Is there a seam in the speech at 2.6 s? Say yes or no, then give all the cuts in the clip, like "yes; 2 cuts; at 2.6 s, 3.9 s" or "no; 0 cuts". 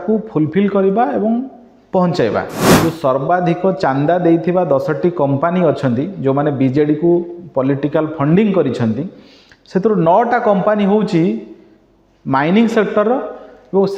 yes; 1 cut; at 2.6 s